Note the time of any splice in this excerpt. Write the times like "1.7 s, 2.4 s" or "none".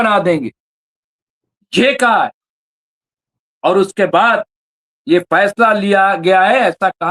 none